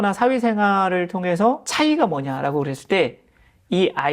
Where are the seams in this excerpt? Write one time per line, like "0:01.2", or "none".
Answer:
0:01.7